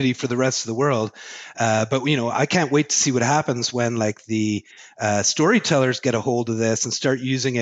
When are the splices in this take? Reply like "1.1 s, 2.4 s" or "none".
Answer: none